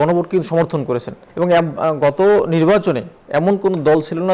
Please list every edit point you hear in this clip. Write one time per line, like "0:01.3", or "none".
0:01.2